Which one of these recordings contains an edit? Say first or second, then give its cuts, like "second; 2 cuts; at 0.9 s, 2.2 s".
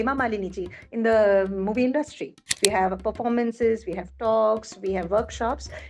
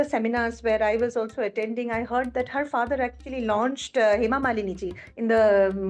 first; 1 cut; at 2.6 s